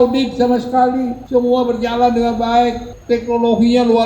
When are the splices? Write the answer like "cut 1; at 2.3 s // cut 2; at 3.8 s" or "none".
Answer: cut 1; at 1.2 s // cut 2; at 2.9 s

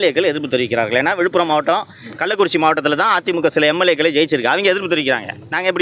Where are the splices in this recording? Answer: none

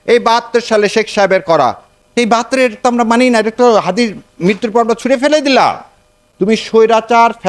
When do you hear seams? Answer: cut 1; at 2.5 s // cut 2; at 6.4 s

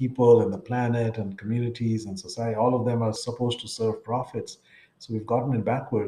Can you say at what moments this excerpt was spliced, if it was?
cut 1; at 3.2 s

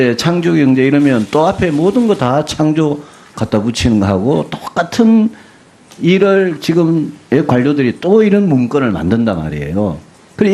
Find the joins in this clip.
cut 1; at 2.9 s

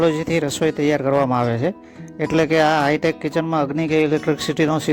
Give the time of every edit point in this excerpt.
none

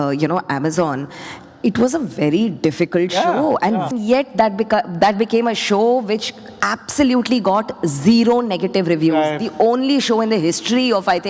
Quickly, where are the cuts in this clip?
cut 1; at 3.9 s

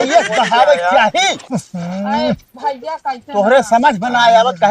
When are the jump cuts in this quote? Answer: none

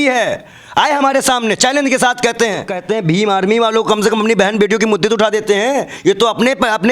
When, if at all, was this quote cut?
cut 1; at 2.8 s

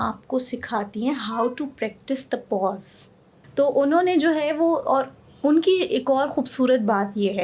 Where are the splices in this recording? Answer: cut 1; at 3.3 s

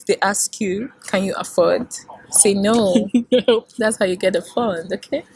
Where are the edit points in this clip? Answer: none

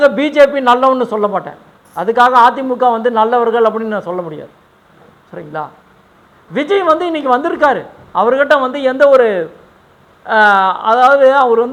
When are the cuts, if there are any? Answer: none

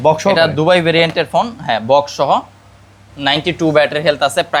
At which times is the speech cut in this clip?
none

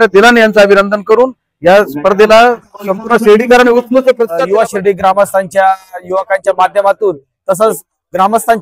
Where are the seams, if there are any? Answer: cut 1; at 4.3 s

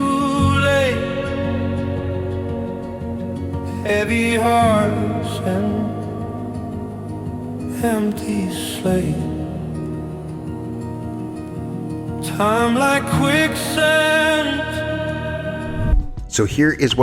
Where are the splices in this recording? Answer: cut 1; at 15.9 s

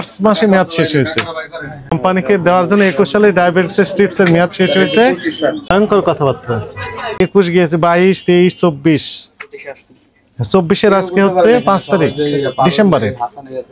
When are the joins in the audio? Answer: cut 1; at 1.9 s // cut 2; at 5.6 s // cut 3; at 7.1 s

